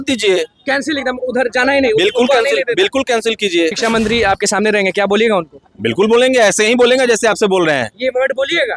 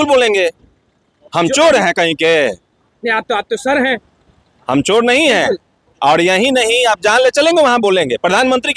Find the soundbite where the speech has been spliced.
first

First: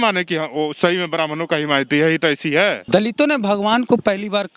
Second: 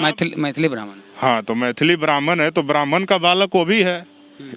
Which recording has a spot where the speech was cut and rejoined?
first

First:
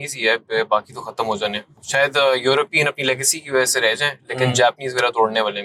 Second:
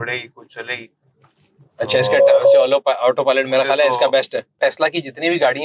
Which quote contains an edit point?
second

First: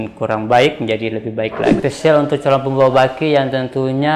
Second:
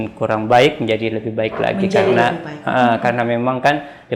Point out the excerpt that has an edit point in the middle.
first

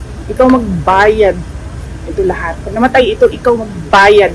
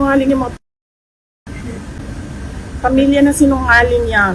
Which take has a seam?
second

